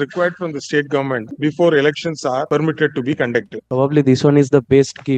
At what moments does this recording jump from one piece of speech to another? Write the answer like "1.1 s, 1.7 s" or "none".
1.3 s, 2.4 s, 3.6 s